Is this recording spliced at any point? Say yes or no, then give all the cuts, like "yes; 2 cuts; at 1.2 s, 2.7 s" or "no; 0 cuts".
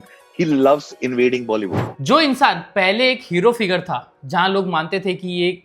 yes; 1 cut; at 1.9 s